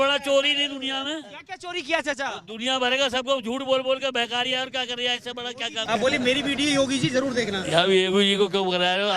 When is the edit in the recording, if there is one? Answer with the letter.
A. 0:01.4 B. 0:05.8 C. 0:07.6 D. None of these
B